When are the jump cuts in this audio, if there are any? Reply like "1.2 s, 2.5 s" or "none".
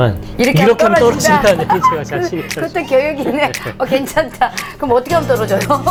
none